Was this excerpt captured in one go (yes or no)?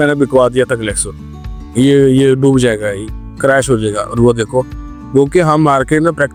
yes